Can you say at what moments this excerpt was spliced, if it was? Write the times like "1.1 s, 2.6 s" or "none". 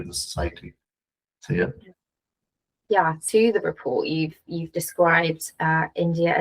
3.2 s